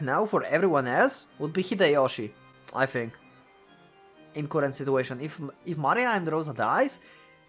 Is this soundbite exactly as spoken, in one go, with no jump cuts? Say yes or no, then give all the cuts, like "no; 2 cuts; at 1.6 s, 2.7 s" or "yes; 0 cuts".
yes; 0 cuts